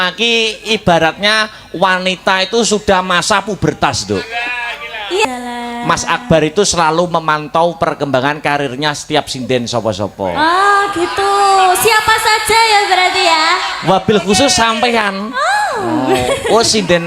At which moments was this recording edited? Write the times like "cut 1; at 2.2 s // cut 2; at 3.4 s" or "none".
cut 1; at 5.2 s